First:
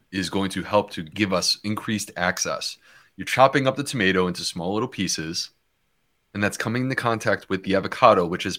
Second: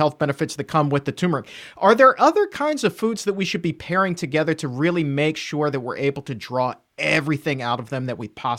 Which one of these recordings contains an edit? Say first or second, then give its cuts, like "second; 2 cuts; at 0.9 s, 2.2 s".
first; 1 cut; at 1.1 s